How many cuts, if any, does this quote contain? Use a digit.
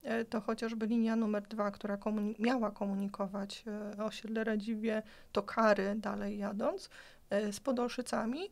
0